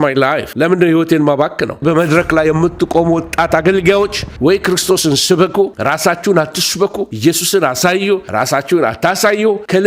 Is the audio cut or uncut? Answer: cut